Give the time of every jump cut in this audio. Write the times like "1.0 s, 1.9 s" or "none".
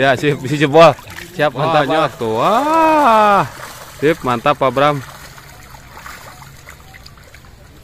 1.9 s